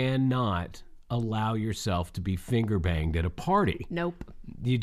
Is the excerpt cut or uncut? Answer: uncut